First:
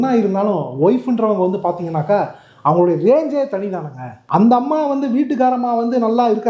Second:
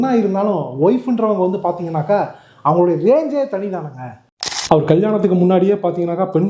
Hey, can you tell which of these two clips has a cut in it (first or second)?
second